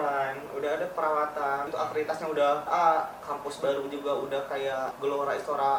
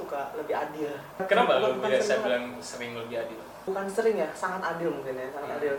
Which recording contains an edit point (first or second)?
first